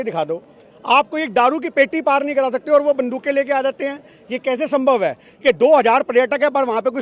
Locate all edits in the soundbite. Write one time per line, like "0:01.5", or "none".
0:05.3